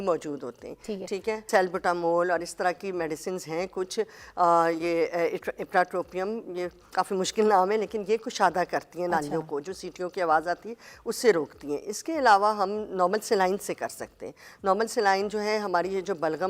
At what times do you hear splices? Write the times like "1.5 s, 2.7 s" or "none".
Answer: 1.4 s